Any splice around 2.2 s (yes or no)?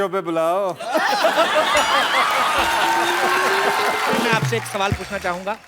no